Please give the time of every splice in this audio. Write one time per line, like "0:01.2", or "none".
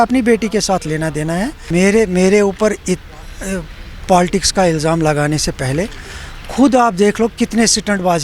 0:01.6